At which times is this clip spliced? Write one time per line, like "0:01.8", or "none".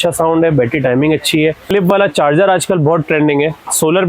0:01.6